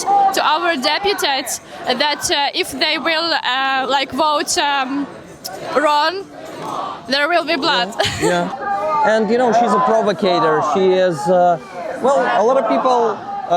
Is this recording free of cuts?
no; 1 cut; at 8.5 s

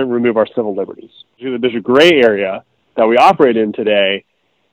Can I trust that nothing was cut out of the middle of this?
yes; 0 cuts

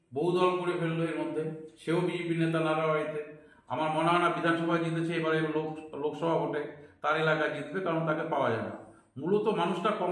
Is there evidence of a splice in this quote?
no; 0 cuts

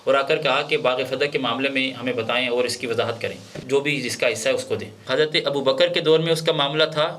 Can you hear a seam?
yes; 2 cuts; at 3.6 s, 4.9 s

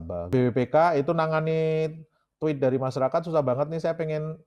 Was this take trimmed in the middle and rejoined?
no; 0 cuts

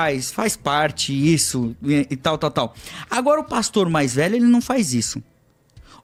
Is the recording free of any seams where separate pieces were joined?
yes; 0 cuts

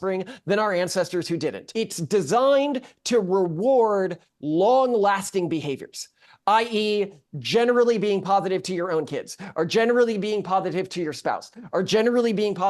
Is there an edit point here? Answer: yes; 1 cut; at 1.6 s

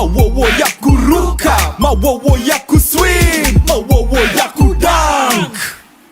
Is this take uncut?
no; 2 cuts; at 3.3 s, 4.9 s

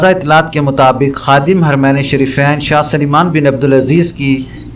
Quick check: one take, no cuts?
yes; 0 cuts

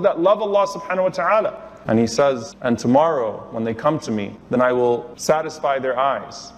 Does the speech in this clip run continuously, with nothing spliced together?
no; 3 cuts; at 2.5 s, 4.3 s, 5.1 s

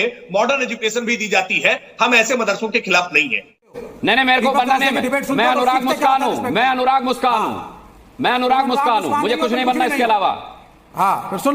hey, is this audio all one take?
no; 1 cut; at 3.7 s

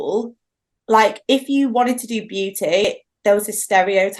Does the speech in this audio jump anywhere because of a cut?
yes; 1 cut; at 2.8 s

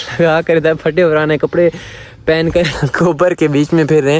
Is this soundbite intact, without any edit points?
yes; 0 cuts

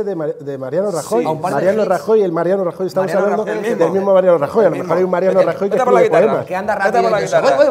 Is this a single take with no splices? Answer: no; 1 cut; at 5.2 s

